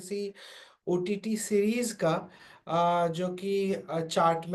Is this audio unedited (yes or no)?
yes